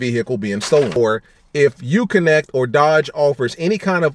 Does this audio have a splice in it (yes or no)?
yes